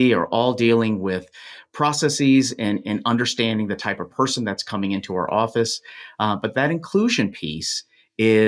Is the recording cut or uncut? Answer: uncut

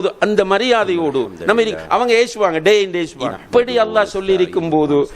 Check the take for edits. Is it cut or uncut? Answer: cut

